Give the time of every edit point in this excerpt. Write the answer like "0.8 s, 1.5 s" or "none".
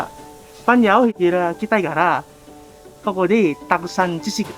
1.1 s